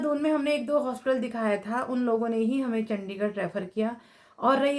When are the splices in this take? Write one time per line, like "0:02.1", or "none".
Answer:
none